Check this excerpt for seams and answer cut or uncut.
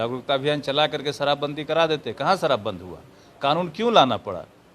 uncut